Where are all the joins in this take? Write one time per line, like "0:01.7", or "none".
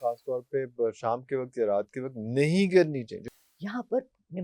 0:03.2